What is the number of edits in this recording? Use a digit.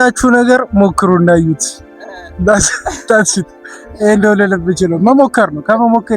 0